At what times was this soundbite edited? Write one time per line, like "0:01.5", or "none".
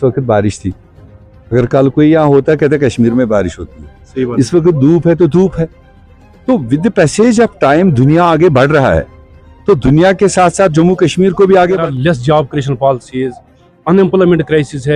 0:11.8

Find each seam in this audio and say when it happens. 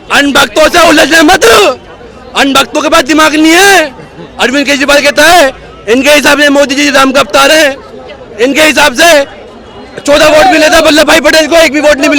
none

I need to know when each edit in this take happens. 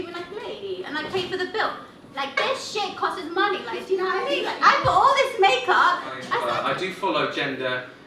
0:06.5

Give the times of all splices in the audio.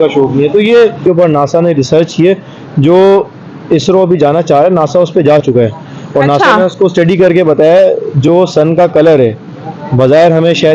0:01.0

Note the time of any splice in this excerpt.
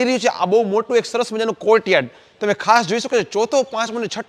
none

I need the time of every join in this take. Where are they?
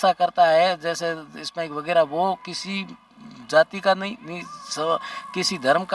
none

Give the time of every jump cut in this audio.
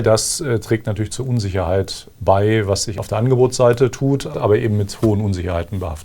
0:02.9
0:04.3

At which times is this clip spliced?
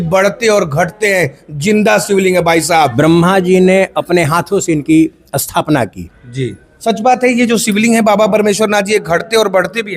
0:02.9
0:06.7

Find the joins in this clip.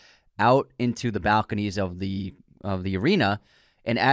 none

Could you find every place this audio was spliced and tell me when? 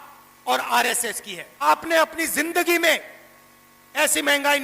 0:01.6

